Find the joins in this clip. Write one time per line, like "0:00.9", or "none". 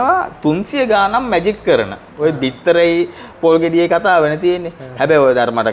none